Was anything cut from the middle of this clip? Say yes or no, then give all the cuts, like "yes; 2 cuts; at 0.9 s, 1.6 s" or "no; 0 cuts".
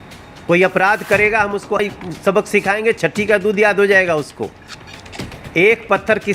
yes; 1 cut; at 1.8 s